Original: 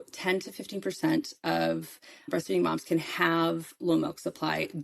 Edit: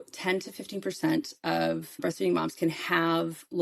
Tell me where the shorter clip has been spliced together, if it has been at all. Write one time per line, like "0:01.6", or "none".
0:01.9